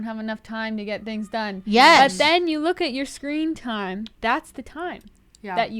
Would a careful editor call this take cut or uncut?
cut